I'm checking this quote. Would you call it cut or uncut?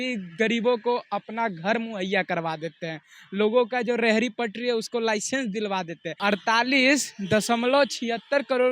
cut